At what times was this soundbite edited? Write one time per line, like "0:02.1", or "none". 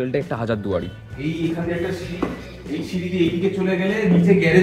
0:01.0